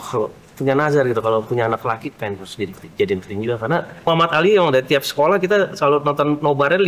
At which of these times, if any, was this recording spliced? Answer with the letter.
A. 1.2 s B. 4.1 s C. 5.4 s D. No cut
B